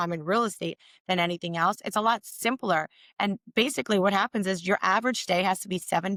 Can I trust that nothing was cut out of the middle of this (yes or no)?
yes